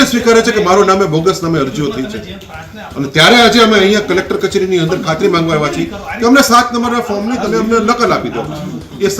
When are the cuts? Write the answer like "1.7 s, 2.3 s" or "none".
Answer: none